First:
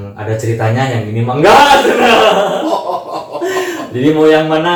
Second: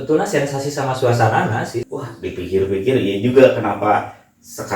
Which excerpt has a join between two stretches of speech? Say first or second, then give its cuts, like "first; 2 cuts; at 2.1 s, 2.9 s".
second; 1 cut; at 1.8 s